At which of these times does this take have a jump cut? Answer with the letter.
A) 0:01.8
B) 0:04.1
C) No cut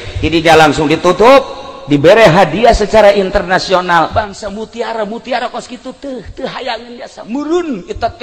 B